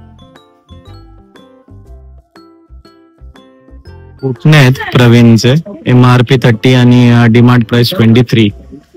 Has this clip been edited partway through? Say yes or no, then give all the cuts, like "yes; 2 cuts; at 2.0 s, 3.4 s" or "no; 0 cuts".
yes; 1 cut; at 4.1 s